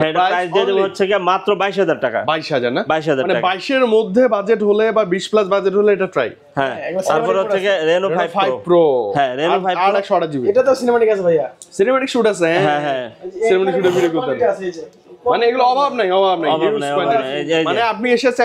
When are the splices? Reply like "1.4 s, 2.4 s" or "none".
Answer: none